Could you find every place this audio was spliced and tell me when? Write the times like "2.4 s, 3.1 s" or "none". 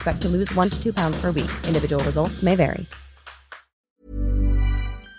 3.9 s